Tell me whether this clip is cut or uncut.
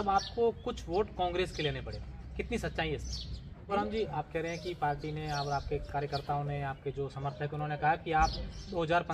cut